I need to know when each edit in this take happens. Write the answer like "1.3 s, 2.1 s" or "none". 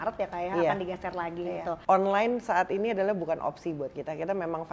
1.7 s